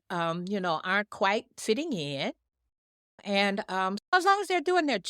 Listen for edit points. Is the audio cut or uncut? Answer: cut